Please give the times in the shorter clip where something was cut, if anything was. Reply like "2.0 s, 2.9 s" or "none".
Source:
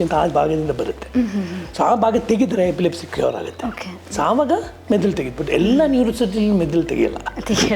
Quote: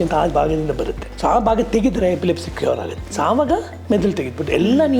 1.0 s, 3.0 s